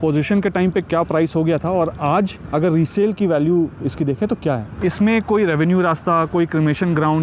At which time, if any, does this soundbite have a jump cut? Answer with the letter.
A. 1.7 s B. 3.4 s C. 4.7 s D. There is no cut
C